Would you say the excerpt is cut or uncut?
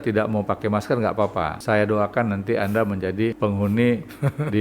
cut